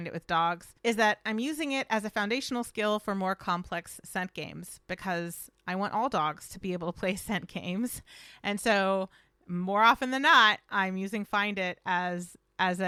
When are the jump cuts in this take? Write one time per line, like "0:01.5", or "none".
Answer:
none